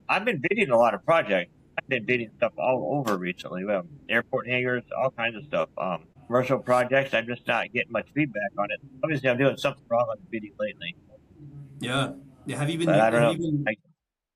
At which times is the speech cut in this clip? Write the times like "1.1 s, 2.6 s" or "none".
none